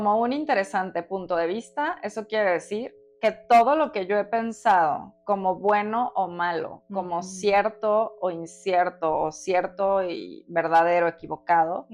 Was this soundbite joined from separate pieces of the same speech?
no; 0 cuts

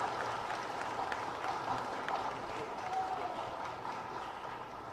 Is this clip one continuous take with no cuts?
yes; 0 cuts

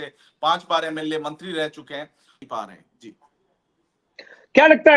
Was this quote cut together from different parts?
yes; 1 cut; at 2.4 s

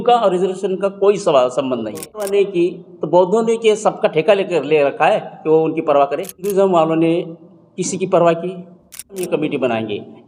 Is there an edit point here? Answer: yes; 3 cuts; at 2.3 s, 6.5 s, 9.2 s

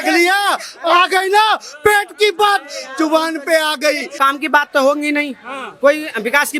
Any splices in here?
yes; 1 cut; at 4.2 s

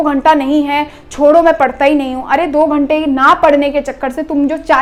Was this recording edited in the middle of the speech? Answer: no; 0 cuts

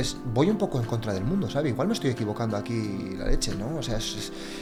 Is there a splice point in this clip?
no; 0 cuts

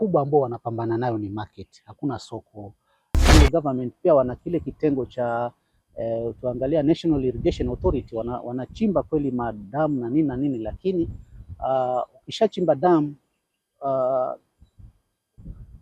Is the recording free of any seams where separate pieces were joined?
no; 1 cut; at 3.3 s

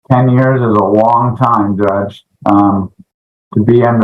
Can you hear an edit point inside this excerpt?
no; 0 cuts

